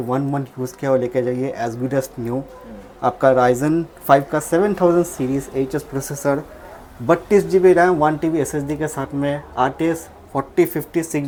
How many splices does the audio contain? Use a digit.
0